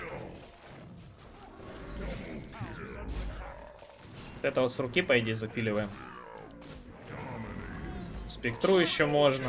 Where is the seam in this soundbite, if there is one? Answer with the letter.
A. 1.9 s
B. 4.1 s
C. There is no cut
A